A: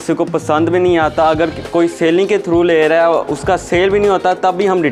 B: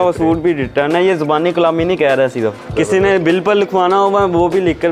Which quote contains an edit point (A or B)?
B